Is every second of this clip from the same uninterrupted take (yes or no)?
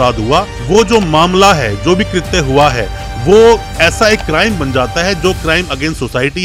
yes